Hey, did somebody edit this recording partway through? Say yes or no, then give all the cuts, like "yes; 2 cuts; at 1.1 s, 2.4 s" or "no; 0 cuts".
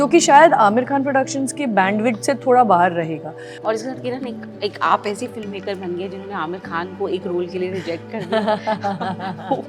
yes; 1 cut; at 3.5 s